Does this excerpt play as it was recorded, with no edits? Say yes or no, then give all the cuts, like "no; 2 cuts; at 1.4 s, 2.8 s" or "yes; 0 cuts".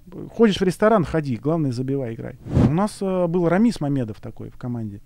no; 1 cut; at 2.6 s